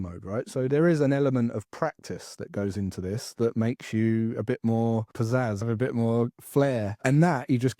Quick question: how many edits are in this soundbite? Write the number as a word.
two